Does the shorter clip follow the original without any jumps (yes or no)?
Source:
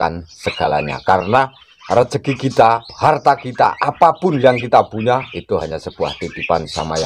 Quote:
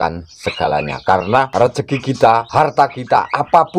no